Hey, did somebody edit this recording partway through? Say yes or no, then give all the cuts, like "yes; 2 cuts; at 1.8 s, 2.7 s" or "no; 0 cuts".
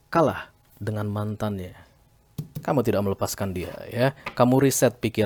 no; 0 cuts